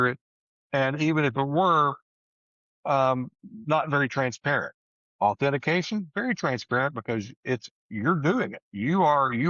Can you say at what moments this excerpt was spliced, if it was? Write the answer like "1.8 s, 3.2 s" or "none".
none